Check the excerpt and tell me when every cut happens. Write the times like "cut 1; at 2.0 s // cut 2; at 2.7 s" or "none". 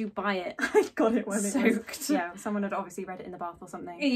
none